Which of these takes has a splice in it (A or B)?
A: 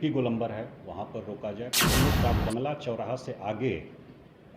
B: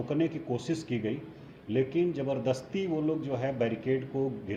A